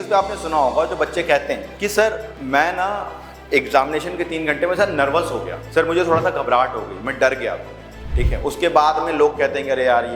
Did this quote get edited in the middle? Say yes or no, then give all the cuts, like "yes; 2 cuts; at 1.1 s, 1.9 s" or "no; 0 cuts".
yes; 3 cuts; at 1.7 s, 2.3 s, 5.6 s